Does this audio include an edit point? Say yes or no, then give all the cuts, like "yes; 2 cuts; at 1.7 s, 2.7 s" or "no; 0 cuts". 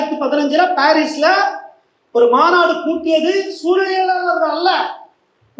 no; 0 cuts